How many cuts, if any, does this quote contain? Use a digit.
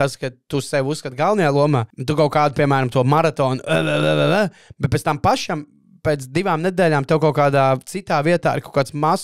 1